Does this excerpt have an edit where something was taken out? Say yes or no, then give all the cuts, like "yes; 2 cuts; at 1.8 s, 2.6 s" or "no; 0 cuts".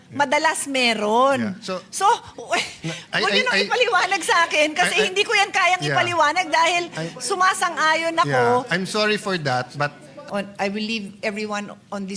yes; 1 cut; at 10.2 s